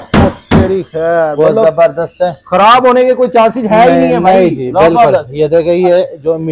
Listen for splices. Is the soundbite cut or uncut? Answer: uncut